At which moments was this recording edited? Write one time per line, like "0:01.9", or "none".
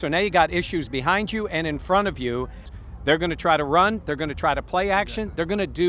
0:02.7